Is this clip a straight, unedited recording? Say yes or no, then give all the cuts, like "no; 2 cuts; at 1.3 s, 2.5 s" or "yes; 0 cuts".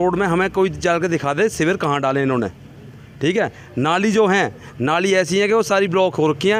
yes; 0 cuts